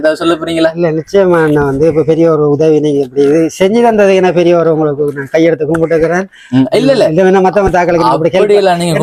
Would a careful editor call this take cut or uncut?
uncut